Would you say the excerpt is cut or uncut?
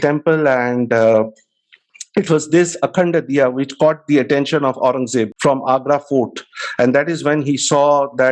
uncut